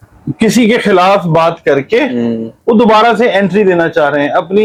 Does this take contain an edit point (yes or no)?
no